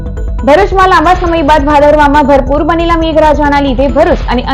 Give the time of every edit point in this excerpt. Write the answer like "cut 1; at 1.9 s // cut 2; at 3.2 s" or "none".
none